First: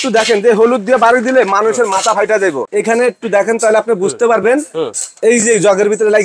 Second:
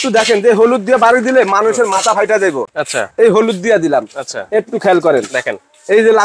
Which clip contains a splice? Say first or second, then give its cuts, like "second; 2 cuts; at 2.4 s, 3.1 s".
first; 1 cut; at 2.7 s